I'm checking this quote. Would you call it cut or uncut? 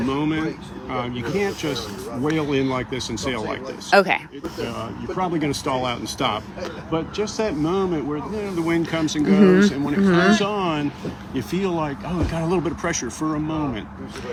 uncut